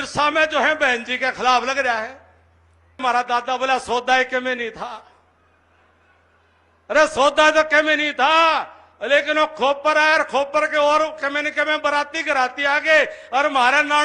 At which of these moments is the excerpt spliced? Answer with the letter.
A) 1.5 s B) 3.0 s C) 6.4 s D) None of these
B